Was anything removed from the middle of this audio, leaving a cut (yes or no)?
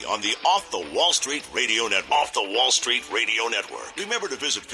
no